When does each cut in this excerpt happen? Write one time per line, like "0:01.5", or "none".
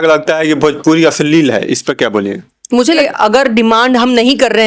0:03.0